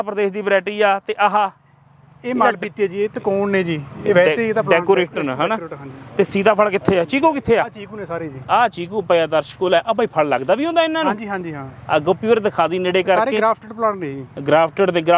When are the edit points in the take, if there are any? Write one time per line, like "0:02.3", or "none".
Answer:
none